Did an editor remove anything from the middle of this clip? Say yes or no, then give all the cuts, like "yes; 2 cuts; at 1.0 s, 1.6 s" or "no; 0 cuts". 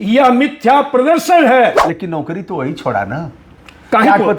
yes; 1 cut; at 1.9 s